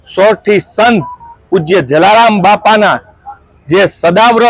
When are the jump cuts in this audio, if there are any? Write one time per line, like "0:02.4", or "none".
none

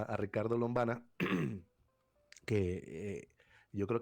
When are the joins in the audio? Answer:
none

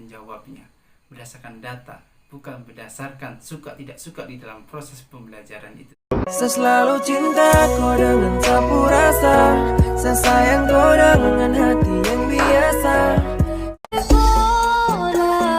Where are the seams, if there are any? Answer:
0:14.0

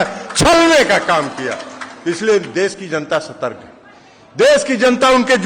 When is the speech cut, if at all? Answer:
none

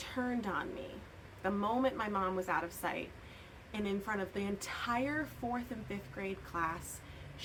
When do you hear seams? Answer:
none

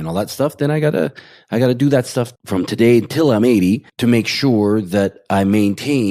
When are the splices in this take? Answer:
0:03.9

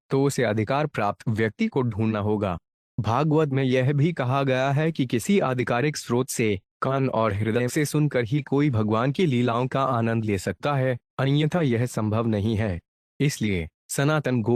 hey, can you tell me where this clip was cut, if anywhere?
none

